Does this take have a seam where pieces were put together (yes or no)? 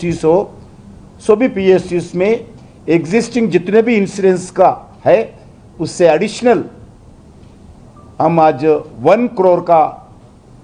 no